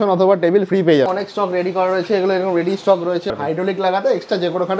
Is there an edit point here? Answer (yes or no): yes